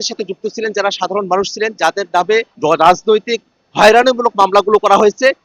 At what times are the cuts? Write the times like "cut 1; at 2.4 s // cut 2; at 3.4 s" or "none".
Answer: cut 1; at 2.5 s